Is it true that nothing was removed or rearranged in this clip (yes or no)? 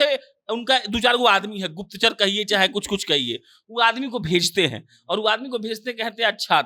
yes